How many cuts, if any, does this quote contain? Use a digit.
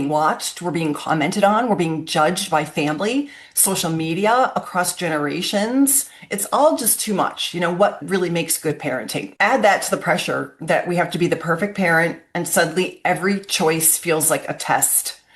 2